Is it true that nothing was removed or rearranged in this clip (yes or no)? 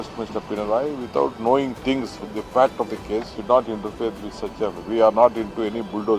no